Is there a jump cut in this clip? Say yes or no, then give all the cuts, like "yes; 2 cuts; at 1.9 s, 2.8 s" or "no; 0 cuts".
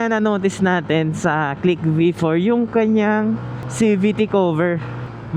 no; 0 cuts